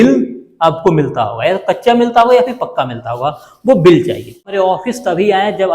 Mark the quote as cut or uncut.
cut